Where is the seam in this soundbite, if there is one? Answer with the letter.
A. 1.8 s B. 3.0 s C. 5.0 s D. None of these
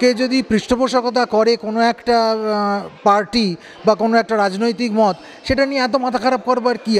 D